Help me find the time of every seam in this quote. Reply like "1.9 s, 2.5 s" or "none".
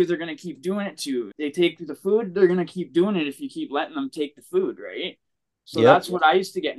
1.3 s